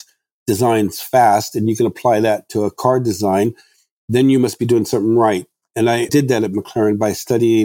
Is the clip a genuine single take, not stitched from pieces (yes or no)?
no